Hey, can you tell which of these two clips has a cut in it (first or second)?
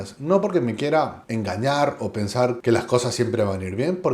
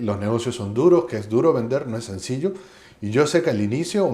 first